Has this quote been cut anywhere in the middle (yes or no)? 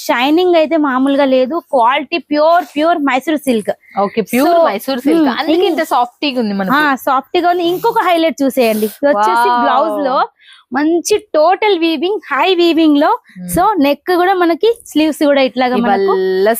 no